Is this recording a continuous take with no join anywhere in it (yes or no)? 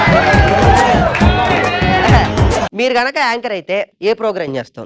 no